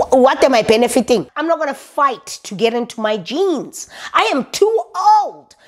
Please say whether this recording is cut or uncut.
cut